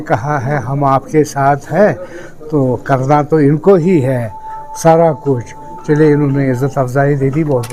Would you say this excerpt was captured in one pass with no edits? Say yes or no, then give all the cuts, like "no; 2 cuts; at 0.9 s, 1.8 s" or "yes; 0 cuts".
yes; 0 cuts